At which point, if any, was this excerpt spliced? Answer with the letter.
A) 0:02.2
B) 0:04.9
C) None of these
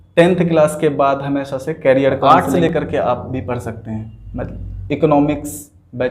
A